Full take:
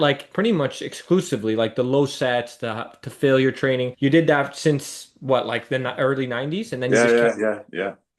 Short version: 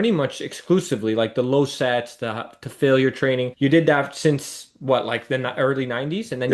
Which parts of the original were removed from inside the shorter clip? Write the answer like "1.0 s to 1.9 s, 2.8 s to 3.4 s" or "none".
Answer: none